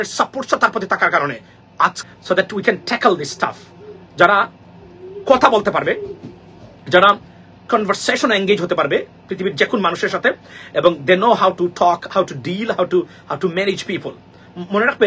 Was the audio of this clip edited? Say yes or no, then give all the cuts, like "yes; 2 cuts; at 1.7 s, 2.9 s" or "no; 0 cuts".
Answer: yes; 1 cut; at 2.0 s